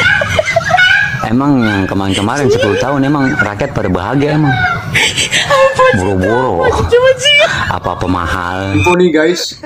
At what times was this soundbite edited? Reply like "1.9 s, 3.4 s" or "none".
8.7 s